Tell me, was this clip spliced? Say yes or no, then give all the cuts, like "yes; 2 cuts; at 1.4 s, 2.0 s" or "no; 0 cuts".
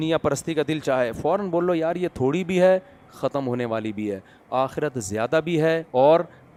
no; 0 cuts